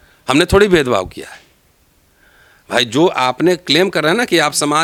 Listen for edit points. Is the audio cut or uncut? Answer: uncut